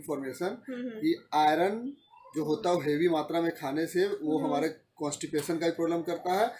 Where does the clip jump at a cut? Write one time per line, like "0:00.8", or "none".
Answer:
none